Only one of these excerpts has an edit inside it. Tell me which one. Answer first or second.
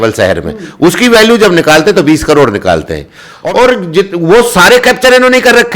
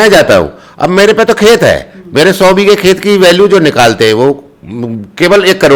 first